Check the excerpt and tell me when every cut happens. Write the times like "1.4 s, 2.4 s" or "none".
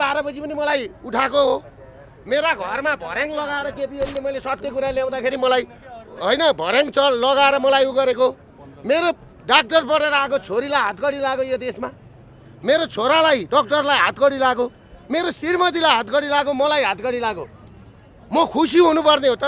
none